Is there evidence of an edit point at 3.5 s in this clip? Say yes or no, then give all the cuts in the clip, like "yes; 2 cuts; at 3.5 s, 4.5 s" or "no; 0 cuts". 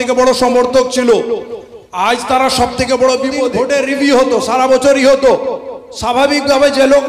yes; 1 cut; at 3.5 s